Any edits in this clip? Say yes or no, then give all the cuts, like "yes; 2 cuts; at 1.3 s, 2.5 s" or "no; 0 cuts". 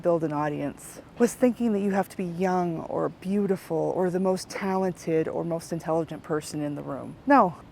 yes; 1 cut; at 0.9 s